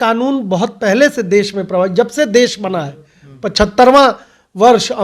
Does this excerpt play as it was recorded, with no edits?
yes; 0 cuts

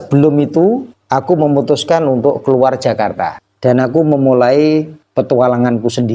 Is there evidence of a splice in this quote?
yes; 3 cuts; at 0.9 s, 3.4 s, 5.0 s

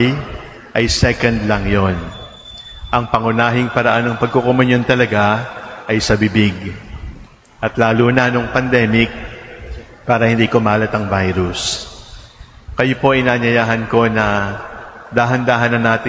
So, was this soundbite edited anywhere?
no; 0 cuts

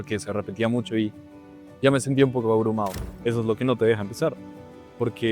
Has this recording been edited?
yes; 1 cut; at 3.0 s

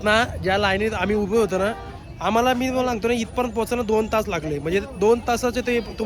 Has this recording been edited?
no; 0 cuts

